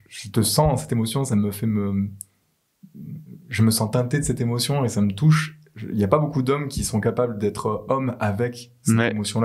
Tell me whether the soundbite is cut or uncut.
uncut